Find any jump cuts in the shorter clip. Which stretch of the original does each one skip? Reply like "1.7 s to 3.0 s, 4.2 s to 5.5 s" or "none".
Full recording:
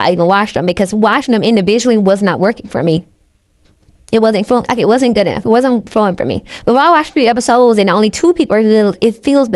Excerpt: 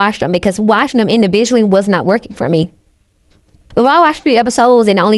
3.9 s to 6.5 s